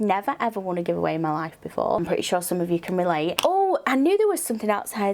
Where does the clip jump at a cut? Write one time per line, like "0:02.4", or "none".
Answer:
0:02.0
0:03.4